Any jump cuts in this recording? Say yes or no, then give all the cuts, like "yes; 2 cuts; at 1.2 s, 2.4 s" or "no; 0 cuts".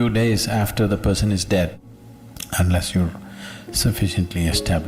yes; 1 cut; at 1.7 s